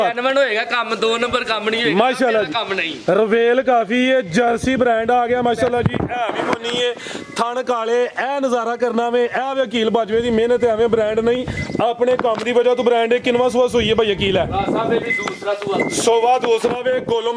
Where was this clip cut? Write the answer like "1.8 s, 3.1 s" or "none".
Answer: none